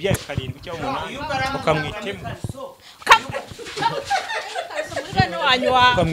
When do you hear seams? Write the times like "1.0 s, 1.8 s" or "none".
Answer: none